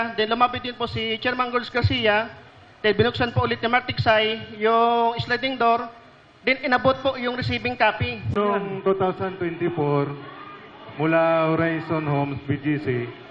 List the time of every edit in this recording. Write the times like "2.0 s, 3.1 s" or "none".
8.3 s

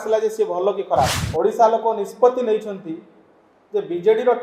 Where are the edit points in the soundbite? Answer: 1.2 s

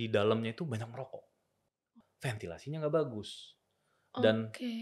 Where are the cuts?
1.9 s

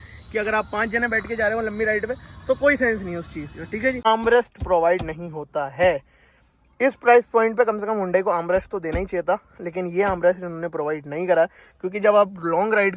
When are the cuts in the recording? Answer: 4.1 s

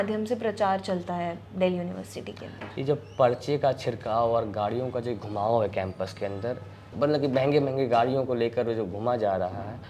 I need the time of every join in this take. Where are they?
6.9 s

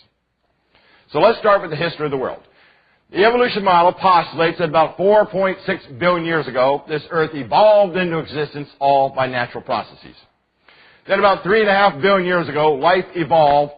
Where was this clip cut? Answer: 7.3 s

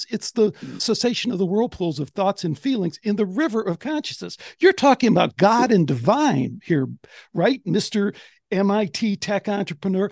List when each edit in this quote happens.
none

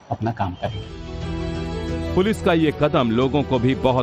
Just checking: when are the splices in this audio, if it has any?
1.9 s

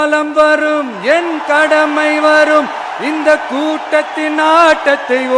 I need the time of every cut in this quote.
none

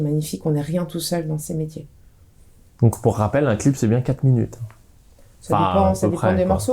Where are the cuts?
none

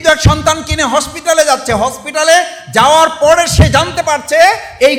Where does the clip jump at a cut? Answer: none

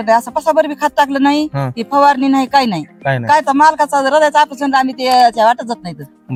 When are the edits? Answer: none

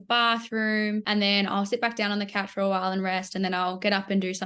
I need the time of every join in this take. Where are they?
1.1 s

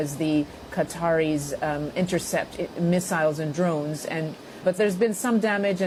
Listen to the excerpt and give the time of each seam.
none

